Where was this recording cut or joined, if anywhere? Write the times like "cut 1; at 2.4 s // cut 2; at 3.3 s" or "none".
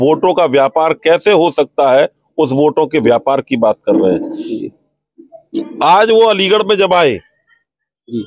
none

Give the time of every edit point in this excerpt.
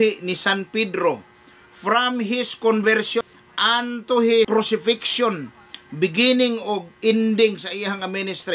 cut 1; at 4.5 s

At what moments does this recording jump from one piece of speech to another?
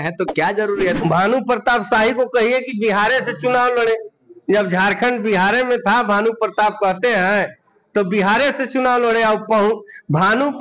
cut 1; at 1.0 s

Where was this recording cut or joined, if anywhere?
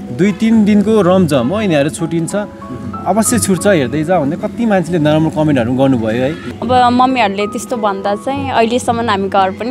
cut 1; at 6.5 s

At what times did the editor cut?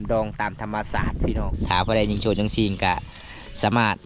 cut 1; at 1.5 s

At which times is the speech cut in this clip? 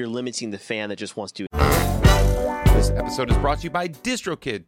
cut 1; at 1.5 s

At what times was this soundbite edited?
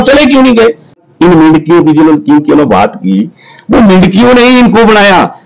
cut 1; at 1.0 s

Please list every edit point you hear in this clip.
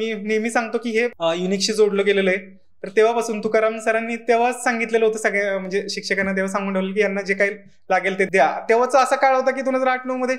cut 1; at 1.2 s // cut 2; at 8.3 s

